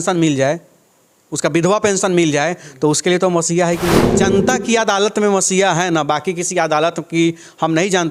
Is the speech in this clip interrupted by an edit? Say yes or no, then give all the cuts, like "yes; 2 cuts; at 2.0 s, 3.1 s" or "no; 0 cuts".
yes; 1 cut; at 4.1 s